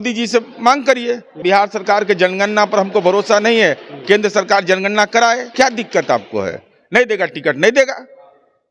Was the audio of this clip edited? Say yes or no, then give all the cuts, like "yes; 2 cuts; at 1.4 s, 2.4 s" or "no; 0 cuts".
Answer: yes; 2 cuts; at 1.4 s, 5.5 s